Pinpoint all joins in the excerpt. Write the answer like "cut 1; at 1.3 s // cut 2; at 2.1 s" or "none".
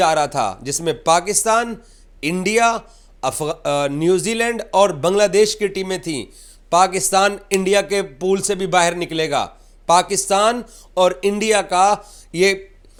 none